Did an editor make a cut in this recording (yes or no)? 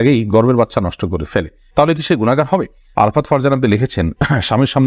yes